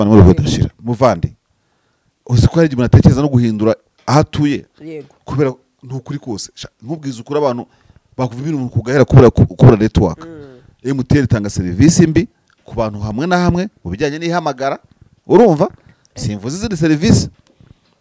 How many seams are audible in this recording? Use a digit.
0